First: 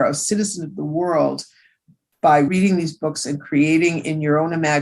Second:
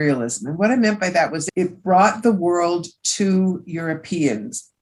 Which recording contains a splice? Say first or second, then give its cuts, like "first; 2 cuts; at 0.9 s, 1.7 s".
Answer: first; 1 cut; at 2.5 s